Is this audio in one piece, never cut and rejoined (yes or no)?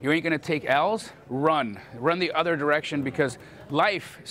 no